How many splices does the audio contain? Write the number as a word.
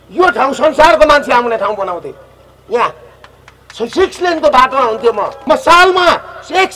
one